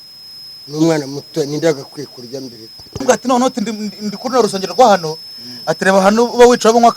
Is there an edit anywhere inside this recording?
yes; 1 cut; at 3.0 s

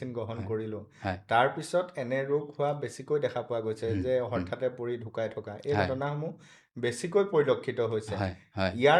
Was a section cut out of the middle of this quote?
no; 0 cuts

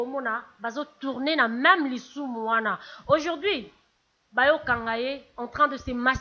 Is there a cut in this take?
no; 0 cuts

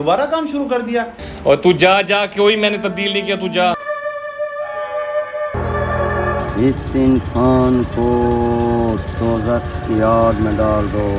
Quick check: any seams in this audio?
yes; 3 cuts; at 1.2 s, 3.8 s, 5.5 s

